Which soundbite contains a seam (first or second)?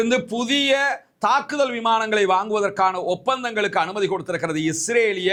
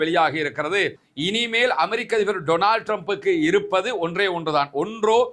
second